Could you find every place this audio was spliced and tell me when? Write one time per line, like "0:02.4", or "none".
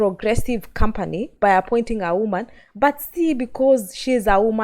0:01.3